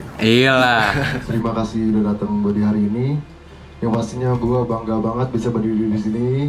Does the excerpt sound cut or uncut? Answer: cut